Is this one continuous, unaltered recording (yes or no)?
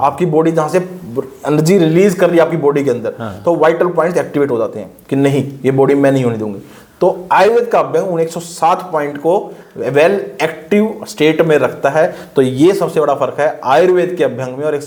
yes